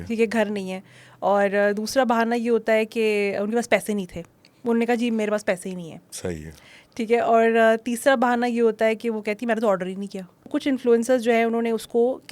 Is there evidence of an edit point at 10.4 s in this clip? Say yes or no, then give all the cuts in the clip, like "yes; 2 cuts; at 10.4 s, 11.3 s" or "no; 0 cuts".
yes; 1 cut; at 10.4 s